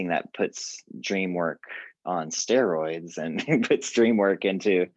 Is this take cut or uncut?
uncut